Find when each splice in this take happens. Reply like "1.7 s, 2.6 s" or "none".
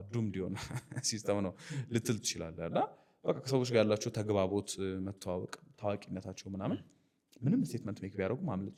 none